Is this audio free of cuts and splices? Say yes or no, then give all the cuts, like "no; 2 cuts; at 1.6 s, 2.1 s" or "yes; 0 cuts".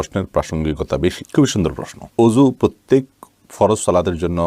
yes; 0 cuts